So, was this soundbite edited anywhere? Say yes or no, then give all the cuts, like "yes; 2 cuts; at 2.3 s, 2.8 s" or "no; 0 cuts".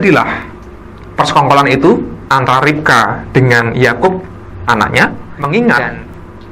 yes; 1 cut; at 5.3 s